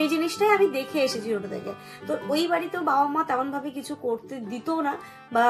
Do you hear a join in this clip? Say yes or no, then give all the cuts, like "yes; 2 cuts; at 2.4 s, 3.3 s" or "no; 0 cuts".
no; 0 cuts